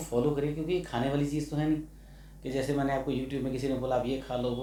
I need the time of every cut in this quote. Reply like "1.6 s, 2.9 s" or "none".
none